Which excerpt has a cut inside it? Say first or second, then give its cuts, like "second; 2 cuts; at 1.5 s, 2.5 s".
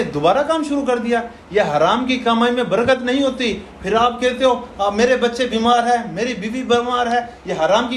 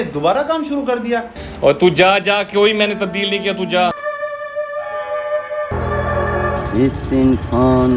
second; 3 cuts; at 1.4 s, 4.0 s, 5.7 s